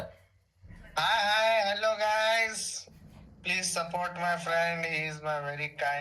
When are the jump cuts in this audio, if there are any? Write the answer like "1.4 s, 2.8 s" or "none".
none